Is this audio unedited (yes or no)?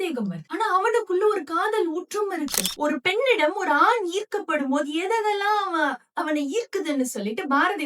no